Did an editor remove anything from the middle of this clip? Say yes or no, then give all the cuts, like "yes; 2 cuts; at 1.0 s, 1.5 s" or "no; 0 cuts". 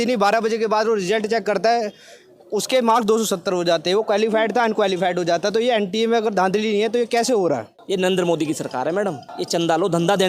yes; 2 cuts; at 7.7 s, 9.3 s